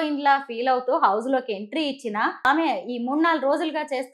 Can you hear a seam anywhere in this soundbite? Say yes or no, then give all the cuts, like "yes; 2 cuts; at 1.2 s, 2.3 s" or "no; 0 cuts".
yes; 1 cut; at 2.5 s